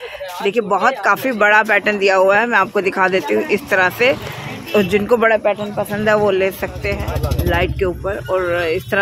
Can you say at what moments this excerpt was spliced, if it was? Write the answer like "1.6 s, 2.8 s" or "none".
7.1 s